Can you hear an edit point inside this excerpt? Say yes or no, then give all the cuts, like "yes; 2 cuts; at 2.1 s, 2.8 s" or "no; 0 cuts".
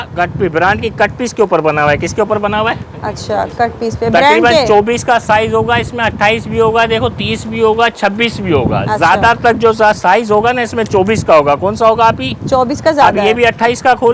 no; 0 cuts